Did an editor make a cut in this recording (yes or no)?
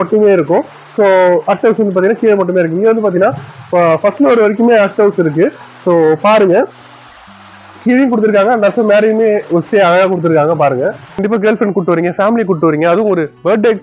yes